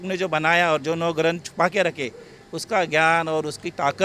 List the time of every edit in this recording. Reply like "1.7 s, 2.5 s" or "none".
none